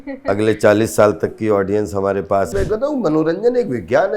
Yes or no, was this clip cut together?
yes